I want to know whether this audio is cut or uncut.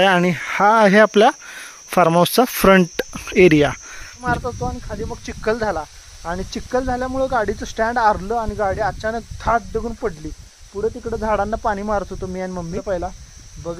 cut